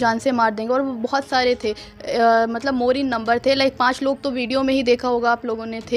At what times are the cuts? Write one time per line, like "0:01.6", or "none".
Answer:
none